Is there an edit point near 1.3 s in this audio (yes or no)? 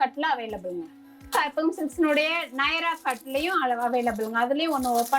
yes